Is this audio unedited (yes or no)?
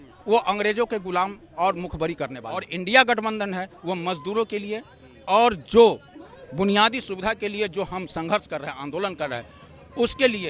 no